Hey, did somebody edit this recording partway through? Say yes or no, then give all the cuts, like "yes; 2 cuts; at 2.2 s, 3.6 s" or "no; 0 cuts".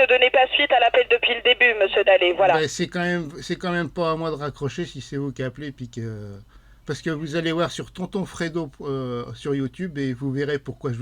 yes; 1 cut; at 2.2 s